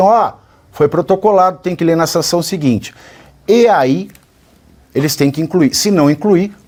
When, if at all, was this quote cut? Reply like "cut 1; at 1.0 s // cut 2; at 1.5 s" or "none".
none